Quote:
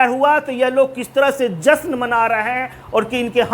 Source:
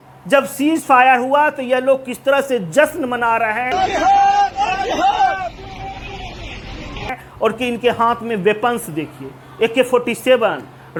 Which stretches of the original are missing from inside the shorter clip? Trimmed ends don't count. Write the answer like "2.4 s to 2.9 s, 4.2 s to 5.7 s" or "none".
3.7 s to 7.0 s